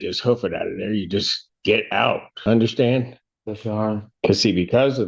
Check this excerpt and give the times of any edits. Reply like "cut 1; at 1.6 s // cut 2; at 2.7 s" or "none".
cut 1; at 2.3 s // cut 2; at 4.1 s